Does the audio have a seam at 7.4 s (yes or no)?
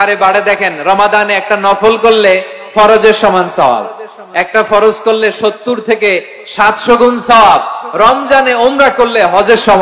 no